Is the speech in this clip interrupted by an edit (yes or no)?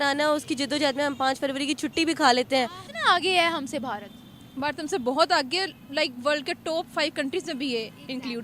yes